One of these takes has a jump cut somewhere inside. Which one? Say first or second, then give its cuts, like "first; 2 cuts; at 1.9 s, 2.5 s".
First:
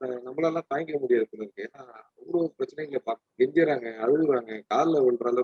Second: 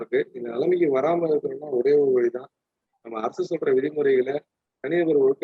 first; 1 cut; at 3.3 s